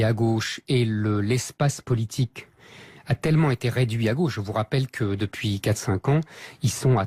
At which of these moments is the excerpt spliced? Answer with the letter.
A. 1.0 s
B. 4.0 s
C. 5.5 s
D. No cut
B